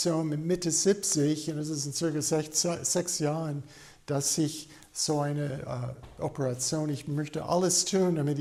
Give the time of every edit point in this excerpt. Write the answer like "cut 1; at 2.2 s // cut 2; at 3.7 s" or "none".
none